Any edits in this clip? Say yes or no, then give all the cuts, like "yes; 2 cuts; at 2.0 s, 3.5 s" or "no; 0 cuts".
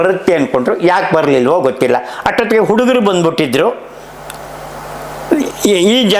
no; 0 cuts